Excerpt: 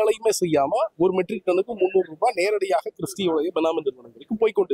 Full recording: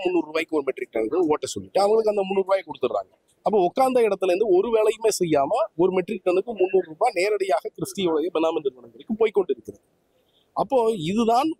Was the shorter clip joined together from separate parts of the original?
no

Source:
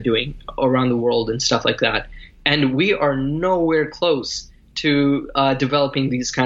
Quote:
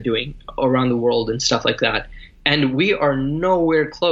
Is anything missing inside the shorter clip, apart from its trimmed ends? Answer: no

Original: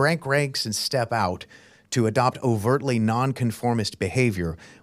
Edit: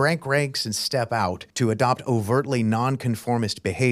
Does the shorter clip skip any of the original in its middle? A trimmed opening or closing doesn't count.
yes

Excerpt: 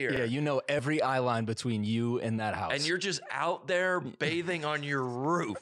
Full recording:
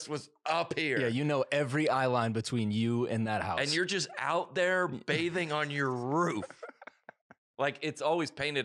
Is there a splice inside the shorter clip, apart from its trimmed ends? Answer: no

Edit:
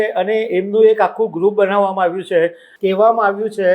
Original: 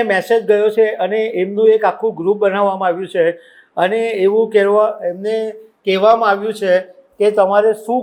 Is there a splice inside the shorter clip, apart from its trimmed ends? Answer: yes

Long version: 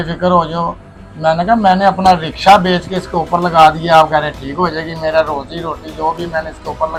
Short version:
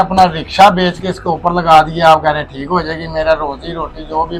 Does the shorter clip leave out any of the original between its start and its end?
no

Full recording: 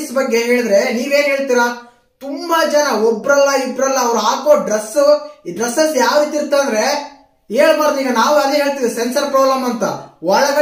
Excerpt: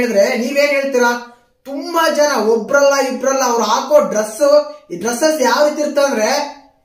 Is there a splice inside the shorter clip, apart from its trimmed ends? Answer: no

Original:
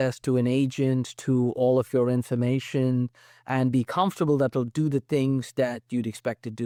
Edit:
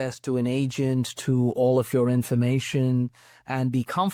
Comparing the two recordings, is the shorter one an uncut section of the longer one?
yes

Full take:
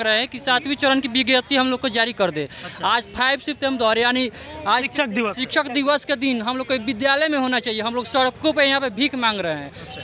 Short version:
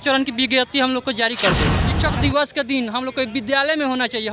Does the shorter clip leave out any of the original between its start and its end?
yes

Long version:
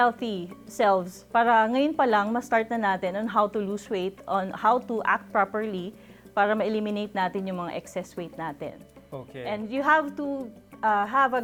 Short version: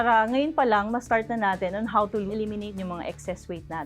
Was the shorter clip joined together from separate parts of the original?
yes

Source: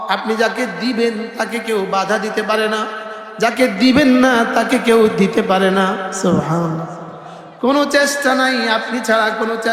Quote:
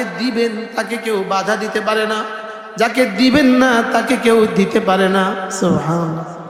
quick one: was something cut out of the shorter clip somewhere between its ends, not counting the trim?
no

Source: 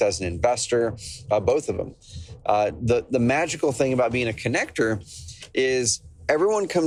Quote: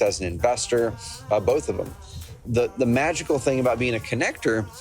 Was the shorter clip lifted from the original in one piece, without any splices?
no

